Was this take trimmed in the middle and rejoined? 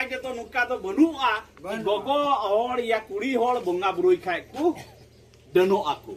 no; 0 cuts

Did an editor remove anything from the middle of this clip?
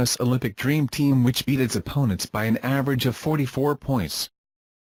no; 0 cuts

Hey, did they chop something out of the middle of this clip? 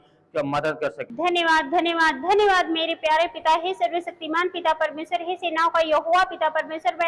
yes; 1 cut; at 1.0 s

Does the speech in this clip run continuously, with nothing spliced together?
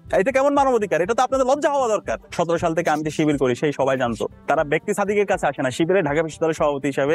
no; 2 cuts; at 2.3 s, 4.3 s

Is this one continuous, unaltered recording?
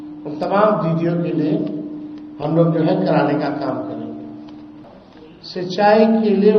no; 1 cut; at 4.9 s

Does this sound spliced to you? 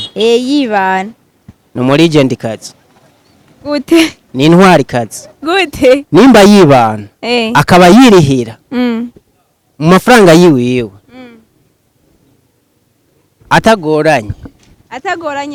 no; 0 cuts

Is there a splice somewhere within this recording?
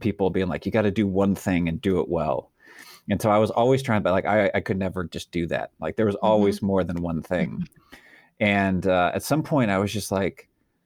no; 0 cuts

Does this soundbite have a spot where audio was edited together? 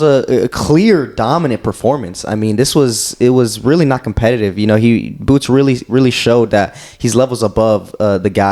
no; 0 cuts

